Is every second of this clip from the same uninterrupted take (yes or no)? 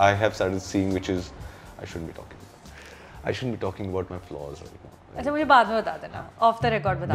yes